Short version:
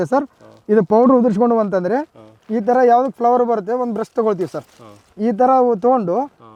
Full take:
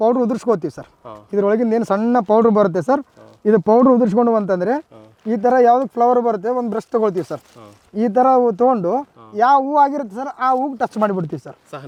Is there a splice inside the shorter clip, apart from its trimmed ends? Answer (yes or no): no